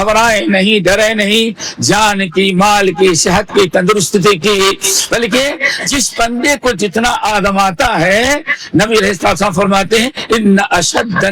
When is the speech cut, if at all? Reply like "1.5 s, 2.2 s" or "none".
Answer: none